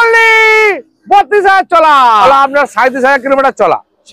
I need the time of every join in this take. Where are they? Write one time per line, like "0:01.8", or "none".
0:02.2